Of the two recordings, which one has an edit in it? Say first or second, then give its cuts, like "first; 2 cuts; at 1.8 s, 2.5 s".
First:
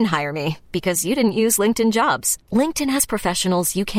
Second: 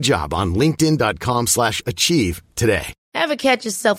second; 1 cut; at 3.0 s